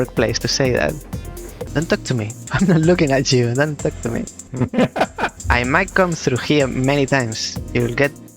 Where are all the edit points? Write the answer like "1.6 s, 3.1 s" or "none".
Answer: 1.6 s, 2.4 s, 4.4 s, 5.4 s